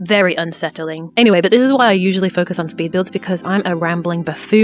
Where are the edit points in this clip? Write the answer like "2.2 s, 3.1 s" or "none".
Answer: 1.1 s